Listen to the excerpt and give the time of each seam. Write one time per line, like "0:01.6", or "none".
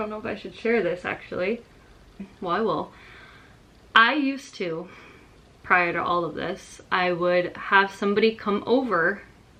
none